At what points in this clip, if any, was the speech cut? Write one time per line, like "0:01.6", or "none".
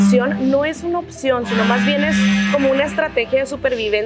none